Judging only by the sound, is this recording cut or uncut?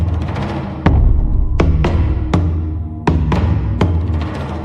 uncut